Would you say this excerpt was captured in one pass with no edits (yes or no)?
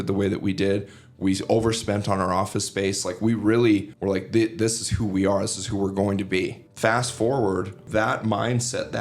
no